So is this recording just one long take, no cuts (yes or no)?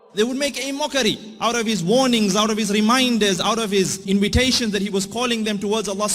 no